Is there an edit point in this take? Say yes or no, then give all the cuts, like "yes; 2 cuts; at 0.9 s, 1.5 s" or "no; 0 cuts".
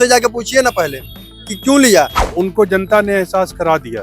yes; 1 cut; at 2.2 s